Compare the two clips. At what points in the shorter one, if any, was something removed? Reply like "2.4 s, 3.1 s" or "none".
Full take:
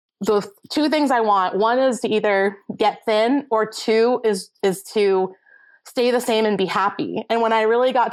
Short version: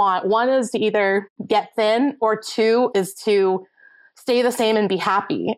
2.9 s